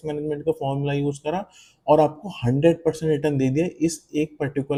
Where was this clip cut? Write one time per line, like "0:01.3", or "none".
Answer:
none